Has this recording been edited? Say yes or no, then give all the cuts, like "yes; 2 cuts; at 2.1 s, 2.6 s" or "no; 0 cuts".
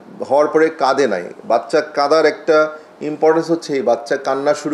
no; 0 cuts